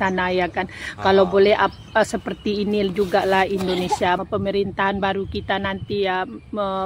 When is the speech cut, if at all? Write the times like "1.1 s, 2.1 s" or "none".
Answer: 4.2 s